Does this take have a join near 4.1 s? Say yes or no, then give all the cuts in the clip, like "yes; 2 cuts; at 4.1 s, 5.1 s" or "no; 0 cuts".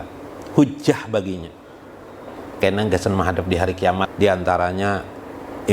yes; 1 cut; at 4.1 s